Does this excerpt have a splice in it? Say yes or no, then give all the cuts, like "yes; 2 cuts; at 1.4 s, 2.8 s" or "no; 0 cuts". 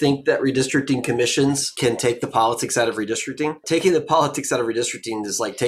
yes; 2 cuts; at 1.7 s, 3.6 s